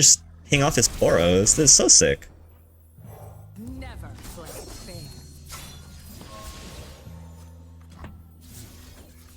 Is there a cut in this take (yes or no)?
no